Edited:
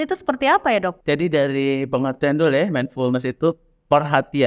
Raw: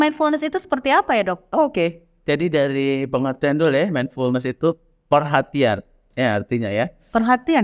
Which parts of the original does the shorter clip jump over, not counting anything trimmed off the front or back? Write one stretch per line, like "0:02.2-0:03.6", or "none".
0:01.4-0:02.1